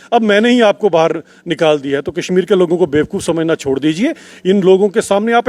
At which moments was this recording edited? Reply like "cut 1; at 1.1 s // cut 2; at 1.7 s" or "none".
none